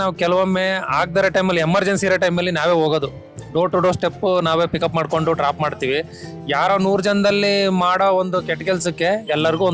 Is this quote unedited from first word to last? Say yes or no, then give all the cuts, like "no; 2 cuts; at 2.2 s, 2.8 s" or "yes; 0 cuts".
yes; 0 cuts